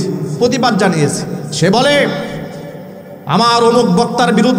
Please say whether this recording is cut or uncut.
cut